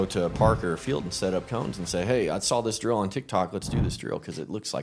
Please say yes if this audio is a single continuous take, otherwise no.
yes